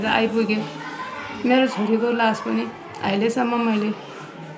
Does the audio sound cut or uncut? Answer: uncut